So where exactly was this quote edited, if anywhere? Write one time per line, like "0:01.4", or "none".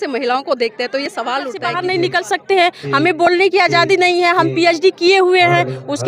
0:01.6